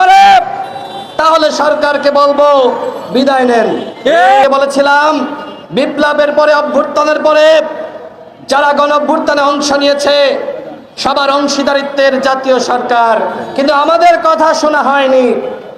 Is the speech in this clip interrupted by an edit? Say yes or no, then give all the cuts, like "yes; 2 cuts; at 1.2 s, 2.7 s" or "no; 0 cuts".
yes; 1 cut; at 4.4 s